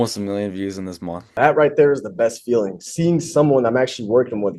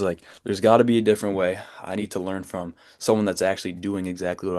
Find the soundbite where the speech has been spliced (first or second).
first